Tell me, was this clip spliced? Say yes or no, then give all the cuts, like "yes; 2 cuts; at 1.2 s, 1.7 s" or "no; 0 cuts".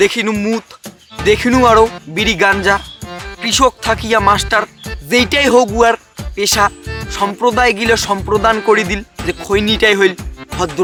no; 0 cuts